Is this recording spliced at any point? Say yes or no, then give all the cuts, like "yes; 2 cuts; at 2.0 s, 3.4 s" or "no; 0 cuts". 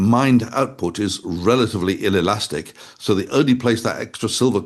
no; 0 cuts